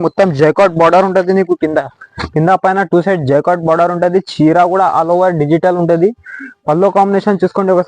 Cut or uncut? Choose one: uncut